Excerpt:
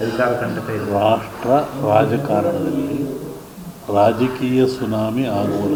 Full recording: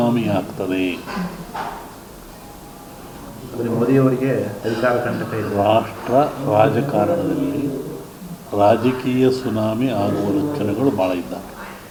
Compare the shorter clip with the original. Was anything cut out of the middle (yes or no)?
no